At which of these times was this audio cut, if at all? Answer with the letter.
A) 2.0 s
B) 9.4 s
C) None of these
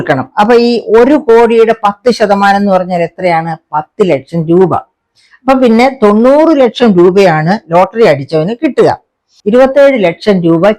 B